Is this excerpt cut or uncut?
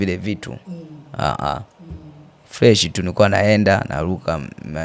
uncut